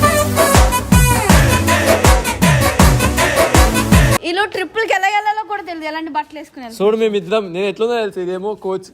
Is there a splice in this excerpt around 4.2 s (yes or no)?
yes